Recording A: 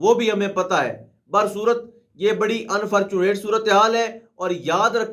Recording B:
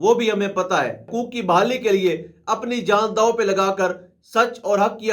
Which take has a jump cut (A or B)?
B